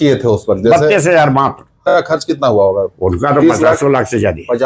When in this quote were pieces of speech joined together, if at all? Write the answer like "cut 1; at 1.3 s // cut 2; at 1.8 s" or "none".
cut 1; at 1.9 s

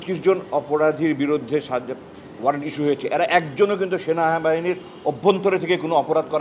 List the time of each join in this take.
none

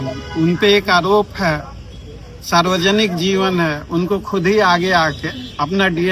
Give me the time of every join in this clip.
none

